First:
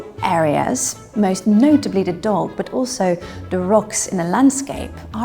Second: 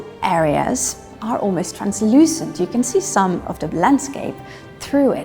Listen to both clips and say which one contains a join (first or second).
second